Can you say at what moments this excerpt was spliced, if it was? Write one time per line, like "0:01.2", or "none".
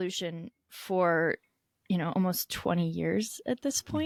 none